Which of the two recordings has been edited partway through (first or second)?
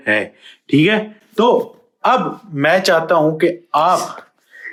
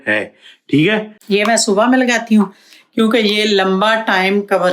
second